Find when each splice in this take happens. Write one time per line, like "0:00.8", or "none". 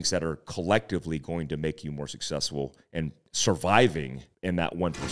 0:03.2
0:04.2